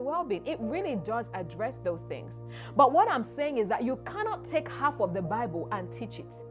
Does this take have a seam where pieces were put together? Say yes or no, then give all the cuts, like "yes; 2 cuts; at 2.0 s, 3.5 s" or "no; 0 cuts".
no; 0 cuts